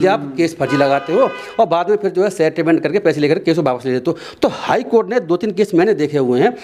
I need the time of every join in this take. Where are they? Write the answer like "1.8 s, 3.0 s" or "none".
none